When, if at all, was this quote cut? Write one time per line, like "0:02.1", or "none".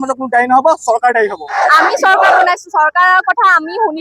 0:01.6